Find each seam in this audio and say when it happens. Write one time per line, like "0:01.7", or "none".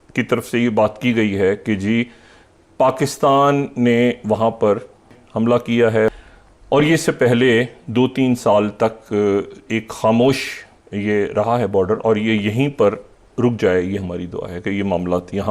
0:05.2
0:06.1